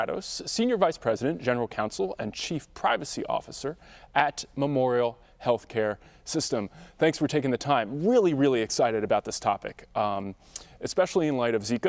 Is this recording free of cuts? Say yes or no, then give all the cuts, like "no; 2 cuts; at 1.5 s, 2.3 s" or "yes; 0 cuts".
no; 1 cut; at 7.9 s